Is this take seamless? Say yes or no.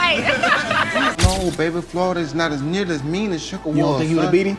no